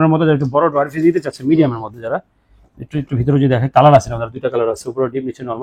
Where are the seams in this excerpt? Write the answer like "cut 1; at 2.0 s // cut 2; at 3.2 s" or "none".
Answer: none